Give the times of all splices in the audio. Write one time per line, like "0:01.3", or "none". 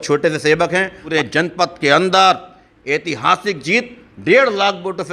0:01.0